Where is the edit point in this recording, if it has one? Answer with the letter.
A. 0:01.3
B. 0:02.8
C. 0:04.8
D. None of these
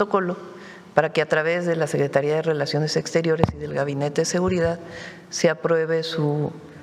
D